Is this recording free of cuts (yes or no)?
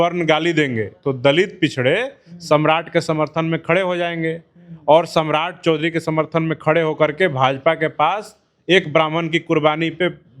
yes